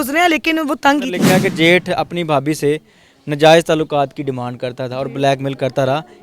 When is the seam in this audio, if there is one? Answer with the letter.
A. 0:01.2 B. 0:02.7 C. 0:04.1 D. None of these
A